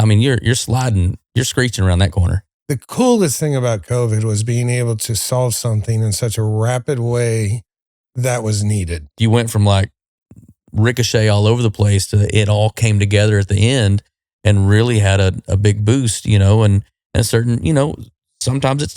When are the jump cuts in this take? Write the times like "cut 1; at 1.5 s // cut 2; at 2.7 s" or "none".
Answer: cut 1; at 2.4 s // cut 2; at 8.0 s // cut 3; at 9.2 s

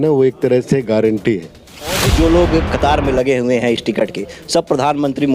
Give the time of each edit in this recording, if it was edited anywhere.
cut 1; at 2.1 s

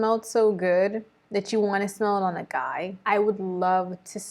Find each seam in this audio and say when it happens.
cut 1; at 3.0 s

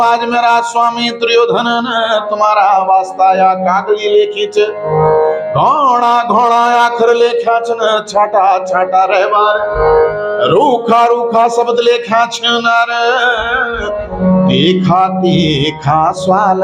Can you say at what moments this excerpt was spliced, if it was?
none

